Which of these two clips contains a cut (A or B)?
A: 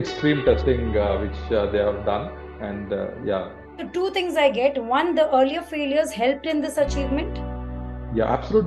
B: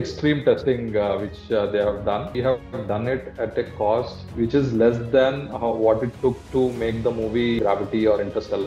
B